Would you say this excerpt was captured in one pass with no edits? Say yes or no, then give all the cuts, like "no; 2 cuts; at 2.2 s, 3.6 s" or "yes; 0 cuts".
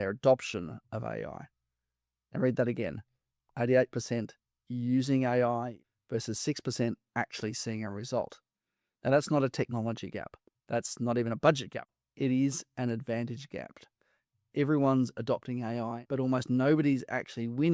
no; 3 cuts; at 5.8 s, 11.9 s, 16.0 s